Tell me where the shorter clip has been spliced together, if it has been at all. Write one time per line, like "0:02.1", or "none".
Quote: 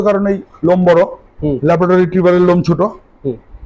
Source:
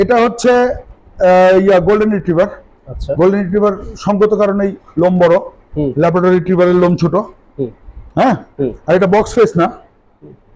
none